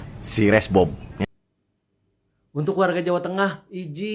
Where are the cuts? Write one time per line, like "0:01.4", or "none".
0:01.2